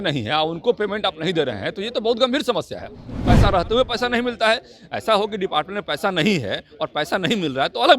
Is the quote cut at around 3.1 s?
yes; 1 cut; at 3.1 s

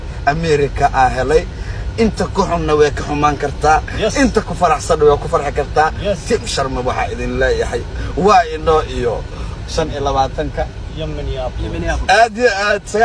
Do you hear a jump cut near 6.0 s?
yes; 1 cut; at 6.0 s

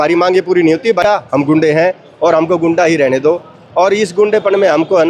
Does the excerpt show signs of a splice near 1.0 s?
yes; 1 cut; at 1.0 s

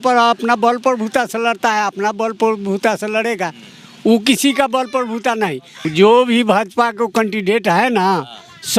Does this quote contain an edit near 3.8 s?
no; 1 cut; at 5.9 s

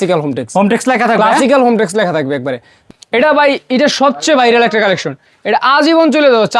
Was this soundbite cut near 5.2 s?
no; 1 cut; at 2.7 s

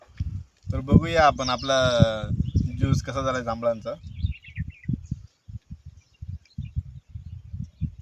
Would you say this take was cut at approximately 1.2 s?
no; 0 cuts

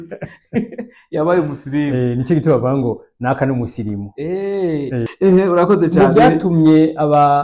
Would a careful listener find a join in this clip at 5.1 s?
yes; 1 cut; at 5.1 s

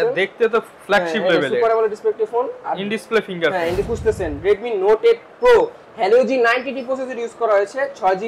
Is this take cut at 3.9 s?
yes; 1 cut; at 3.9 s

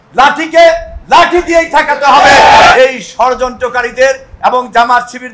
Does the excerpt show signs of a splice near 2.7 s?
yes; 1 cut; at 2.7 s

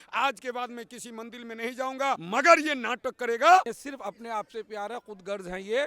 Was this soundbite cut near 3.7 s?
yes; 2 cuts; at 2.2 s, 3.7 s

